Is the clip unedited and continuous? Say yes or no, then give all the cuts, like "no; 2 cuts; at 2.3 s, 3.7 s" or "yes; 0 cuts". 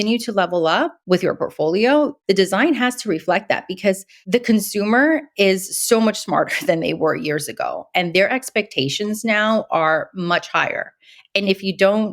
no; 3 cuts; at 1.0 s, 2.2 s, 4.1 s